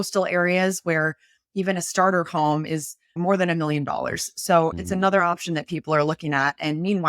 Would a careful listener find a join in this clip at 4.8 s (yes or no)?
yes